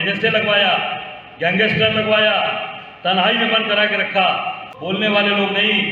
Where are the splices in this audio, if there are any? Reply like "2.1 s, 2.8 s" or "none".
4.7 s